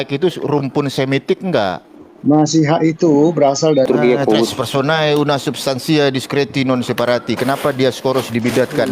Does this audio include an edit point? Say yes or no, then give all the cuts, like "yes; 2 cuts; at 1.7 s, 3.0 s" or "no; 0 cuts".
yes; 1 cut; at 3.9 s